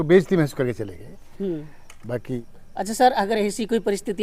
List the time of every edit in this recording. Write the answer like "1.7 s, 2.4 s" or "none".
2.4 s

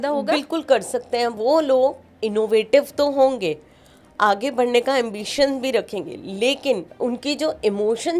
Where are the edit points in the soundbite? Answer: 1.3 s, 6.9 s

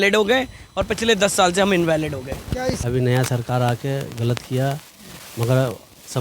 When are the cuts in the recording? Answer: 2.8 s

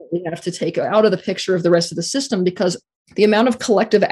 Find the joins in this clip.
2.8 s

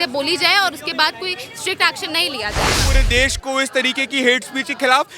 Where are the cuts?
2.8 s

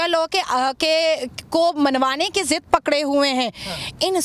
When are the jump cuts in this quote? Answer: none

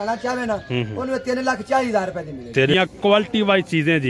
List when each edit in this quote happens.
2.7 s

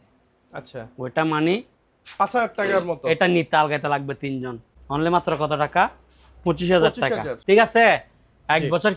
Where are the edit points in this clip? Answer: 4.7 s, 7.3 s

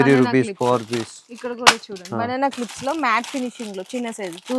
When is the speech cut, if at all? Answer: none

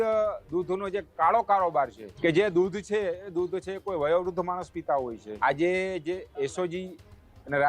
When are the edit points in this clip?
2.0 s, 5.2 s

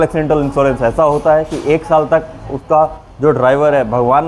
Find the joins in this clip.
none

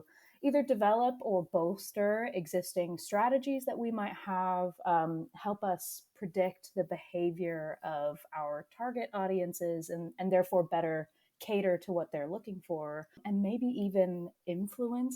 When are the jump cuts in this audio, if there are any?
13.2 s

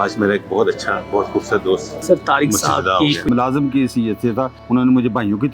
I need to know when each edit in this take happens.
1.9 s, 3.3 s, 4.6 s

